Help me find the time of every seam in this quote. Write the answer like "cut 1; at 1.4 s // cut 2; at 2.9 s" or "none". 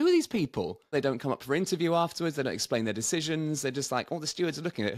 cut 1; at 0.9 s